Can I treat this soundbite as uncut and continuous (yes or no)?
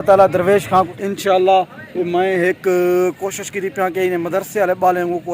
no